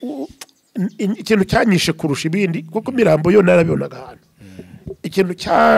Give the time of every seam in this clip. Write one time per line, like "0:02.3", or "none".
none